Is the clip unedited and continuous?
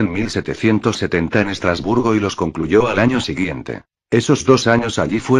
yes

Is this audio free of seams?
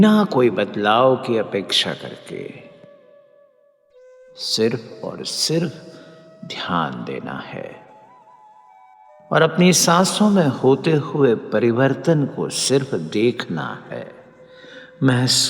no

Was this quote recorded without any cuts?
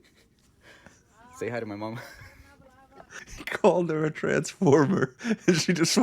no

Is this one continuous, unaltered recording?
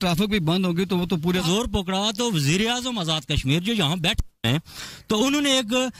no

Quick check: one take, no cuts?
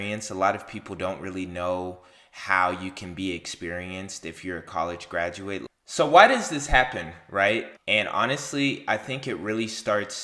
no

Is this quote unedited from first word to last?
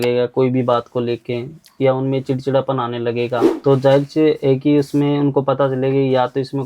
no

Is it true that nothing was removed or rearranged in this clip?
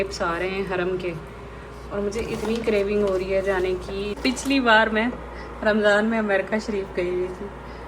no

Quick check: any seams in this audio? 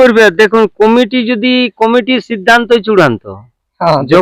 no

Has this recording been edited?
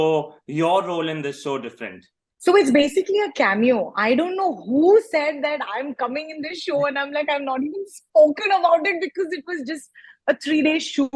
no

